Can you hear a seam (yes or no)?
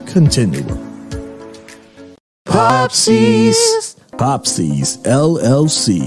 yes